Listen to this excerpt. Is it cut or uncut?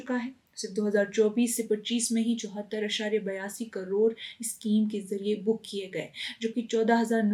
uncut